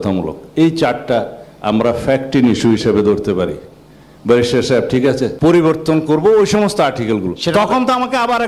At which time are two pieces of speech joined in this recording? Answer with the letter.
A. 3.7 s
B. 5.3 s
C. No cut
B